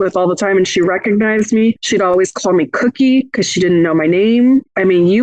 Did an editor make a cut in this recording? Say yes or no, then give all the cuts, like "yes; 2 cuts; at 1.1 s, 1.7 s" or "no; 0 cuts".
yes; 1 cut; at 1.8 s